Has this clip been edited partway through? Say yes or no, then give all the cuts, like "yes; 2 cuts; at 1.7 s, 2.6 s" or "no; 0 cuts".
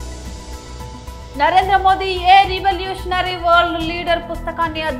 yes; 1 cut; at 1.0 s